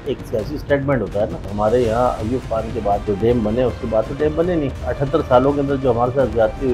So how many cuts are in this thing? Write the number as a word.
three